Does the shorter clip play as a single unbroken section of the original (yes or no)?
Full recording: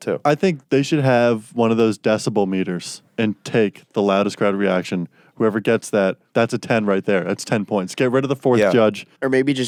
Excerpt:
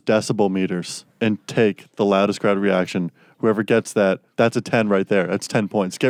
yes